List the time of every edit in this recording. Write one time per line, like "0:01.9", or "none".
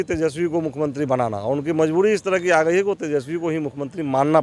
none